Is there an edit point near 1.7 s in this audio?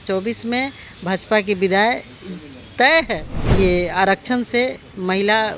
no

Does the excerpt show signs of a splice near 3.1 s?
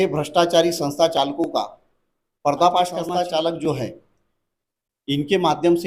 yes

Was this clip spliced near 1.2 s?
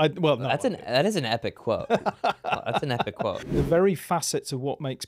no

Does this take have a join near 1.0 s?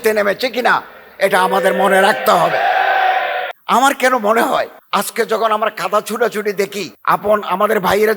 no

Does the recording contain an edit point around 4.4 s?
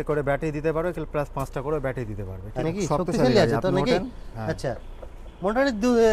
no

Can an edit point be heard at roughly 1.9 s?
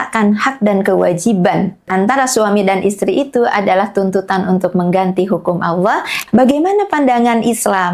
yes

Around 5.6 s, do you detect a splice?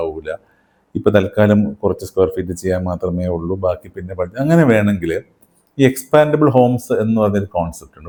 no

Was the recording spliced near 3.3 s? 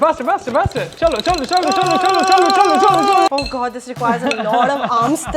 yes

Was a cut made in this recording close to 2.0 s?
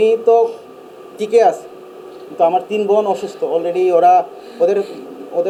no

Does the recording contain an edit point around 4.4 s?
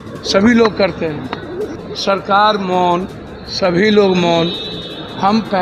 no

